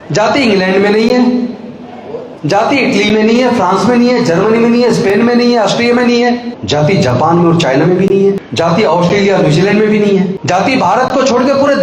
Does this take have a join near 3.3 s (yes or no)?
no